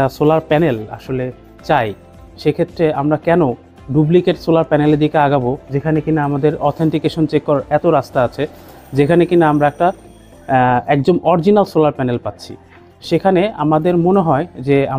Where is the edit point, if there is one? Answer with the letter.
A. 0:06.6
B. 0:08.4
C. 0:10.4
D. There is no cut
D